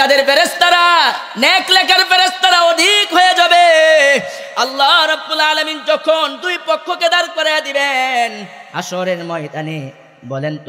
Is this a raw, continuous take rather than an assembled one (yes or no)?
yes